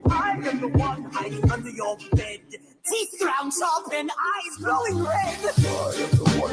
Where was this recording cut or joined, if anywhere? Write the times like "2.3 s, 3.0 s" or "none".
3.8 s